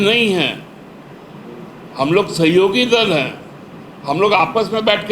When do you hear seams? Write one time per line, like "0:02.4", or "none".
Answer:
none